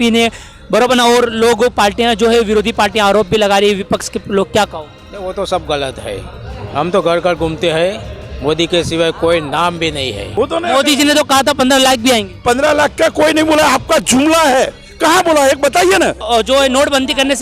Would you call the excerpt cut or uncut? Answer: cut